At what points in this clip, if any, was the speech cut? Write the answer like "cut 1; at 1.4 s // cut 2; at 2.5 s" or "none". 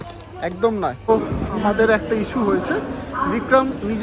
cut 1; at 1.0 s

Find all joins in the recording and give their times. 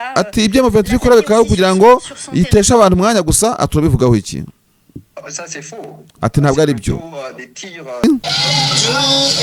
cut 1; at 8.0 s

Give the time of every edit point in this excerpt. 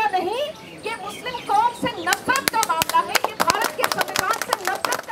none

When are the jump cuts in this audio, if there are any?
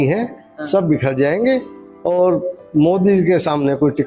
none

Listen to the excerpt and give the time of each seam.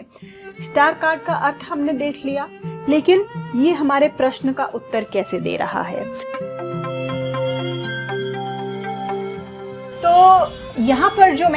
cut 1; at 6.2 s

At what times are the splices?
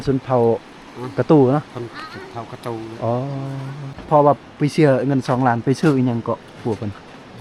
cut 1; at 4.0 s

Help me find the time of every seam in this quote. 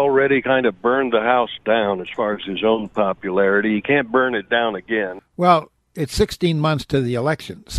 cut 1; at 5.2 s

